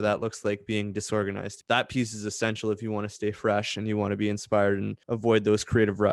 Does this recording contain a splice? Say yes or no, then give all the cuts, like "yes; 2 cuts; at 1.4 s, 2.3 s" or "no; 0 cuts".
yes; 2 cuts; at 1.6 s, 5.0 s